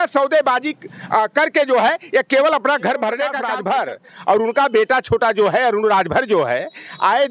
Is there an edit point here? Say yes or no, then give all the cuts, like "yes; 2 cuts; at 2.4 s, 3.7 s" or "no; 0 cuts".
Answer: yes; 1 cut; at 3.4 s